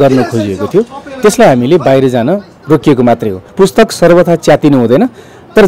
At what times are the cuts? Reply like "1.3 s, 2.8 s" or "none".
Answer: 3.4 s